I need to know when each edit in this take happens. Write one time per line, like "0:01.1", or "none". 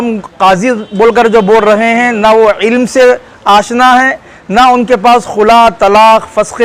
none